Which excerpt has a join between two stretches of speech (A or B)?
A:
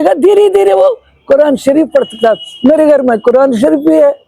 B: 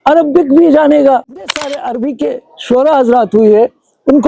B